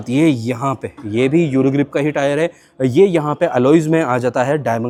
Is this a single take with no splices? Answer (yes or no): yes